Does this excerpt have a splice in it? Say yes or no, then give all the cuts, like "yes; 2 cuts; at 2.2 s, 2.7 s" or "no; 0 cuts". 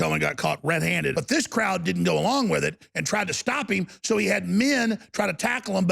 yes; 1 cut; at 1.1 s